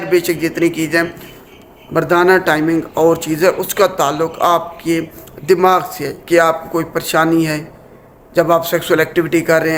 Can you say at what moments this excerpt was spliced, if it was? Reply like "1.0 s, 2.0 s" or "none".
none